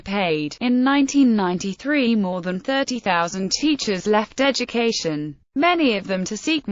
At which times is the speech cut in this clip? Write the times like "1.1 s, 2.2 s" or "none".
3.7 s

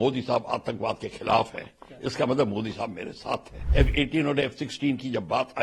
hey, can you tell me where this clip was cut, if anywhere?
3.6 s

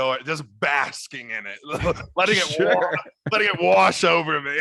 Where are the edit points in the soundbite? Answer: none

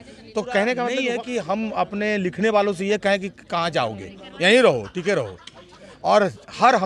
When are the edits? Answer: 1.0 s

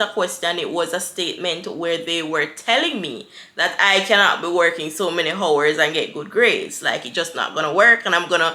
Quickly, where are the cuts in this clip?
none

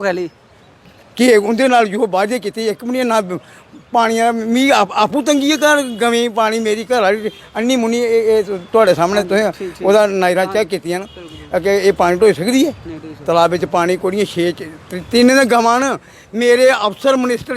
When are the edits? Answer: none

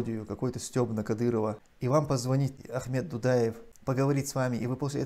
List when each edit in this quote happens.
1.7 s, 2.6 s, 3.7 s

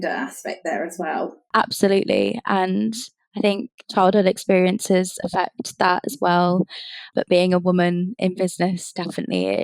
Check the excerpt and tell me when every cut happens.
1.4 s

